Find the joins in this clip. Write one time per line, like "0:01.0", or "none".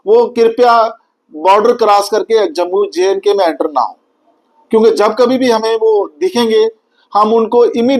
none